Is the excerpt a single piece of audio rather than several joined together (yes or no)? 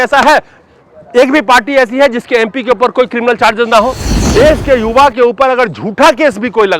no